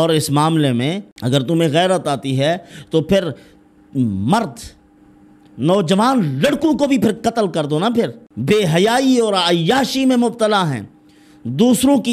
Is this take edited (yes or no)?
yes